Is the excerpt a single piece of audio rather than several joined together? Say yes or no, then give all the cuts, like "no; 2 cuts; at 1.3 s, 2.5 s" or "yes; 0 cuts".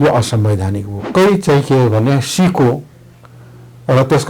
no; 1 cut; at 0.9 s